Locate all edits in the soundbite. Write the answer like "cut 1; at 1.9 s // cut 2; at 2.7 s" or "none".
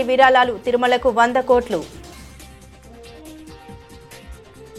cut 1; at 1.9 s